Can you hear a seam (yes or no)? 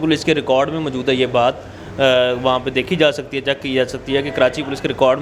no